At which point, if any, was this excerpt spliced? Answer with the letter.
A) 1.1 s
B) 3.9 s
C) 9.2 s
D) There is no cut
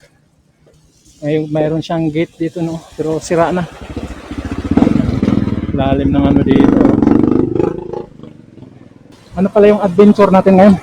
C